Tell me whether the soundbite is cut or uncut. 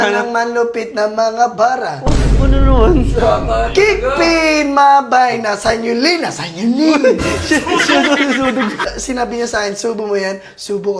cut